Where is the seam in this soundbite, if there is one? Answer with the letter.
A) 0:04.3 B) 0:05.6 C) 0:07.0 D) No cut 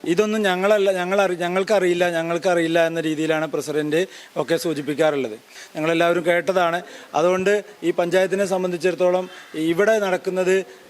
B